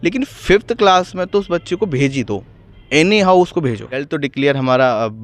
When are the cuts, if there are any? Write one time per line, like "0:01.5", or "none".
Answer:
0:04.1